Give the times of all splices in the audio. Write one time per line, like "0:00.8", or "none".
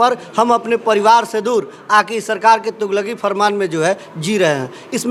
none